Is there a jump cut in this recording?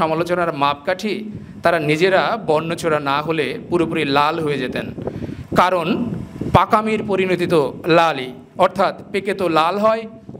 no; 0 cuts

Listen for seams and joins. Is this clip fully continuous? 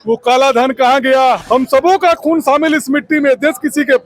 no; 1 cut; at 1.4 s

